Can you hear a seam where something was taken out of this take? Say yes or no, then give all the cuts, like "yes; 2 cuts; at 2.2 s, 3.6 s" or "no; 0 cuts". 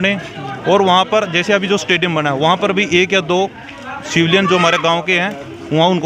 no; 0 cuts